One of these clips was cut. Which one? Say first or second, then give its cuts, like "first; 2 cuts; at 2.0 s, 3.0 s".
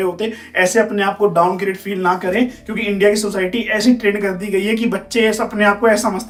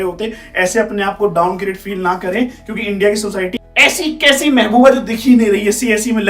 second; 1 cut; at 3.6 s